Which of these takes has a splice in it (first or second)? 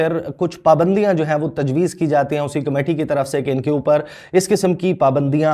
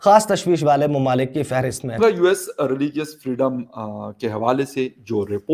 second